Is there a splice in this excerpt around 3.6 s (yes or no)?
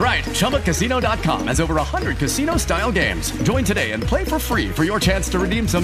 no